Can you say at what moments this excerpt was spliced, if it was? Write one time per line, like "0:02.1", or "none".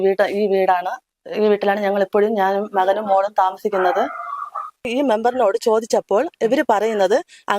0:04.9